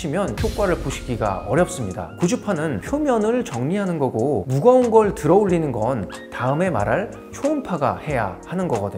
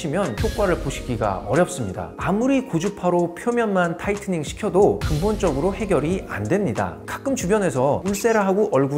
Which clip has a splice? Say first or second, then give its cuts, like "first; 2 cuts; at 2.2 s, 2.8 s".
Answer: second; 2 cuts; at 2.1 s, 7.0 s